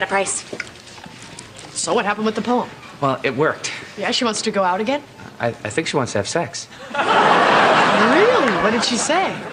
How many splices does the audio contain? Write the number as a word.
one